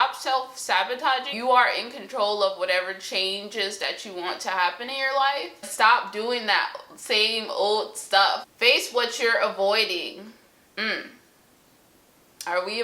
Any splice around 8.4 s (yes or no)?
yes